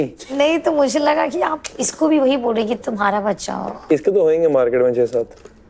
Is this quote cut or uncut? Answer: uncut